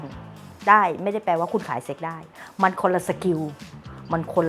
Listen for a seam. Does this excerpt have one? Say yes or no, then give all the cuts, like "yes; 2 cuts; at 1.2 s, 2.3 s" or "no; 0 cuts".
yes; 1 cut; at 2.2 s